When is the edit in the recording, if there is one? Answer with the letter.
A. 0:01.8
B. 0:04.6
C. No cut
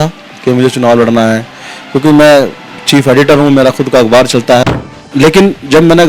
B